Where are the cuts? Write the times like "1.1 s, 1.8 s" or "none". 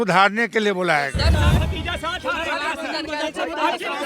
1.3 s